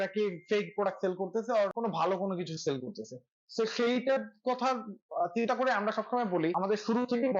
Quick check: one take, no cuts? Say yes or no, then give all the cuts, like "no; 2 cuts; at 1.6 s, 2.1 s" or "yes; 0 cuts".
no; 2 cuts; at 1.7 s, 6.6 s